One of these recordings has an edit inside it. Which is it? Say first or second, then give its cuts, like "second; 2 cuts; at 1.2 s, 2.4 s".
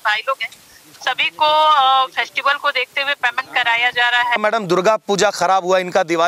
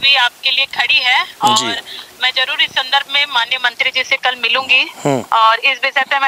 first; 1 cut; at 4.4 s